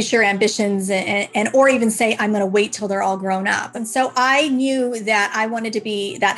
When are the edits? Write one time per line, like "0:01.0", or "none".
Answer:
0:03.7